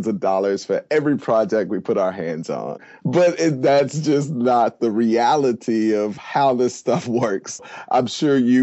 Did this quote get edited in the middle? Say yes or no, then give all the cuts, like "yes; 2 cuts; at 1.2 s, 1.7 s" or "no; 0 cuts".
yes; 2 cuts; at 2.9 s, 7.6 s